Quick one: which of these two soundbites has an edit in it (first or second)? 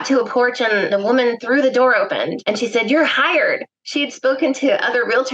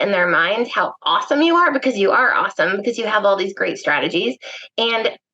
first